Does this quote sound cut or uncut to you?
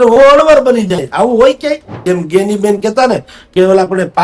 cut